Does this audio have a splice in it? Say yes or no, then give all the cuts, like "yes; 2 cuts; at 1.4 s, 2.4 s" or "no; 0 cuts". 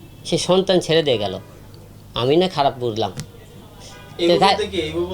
no; 0 cuts